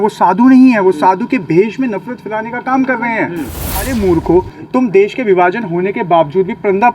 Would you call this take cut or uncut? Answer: cut